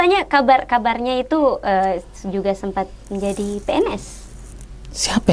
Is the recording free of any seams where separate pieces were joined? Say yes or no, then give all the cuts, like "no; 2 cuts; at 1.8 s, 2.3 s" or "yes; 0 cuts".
yes; 0 cuts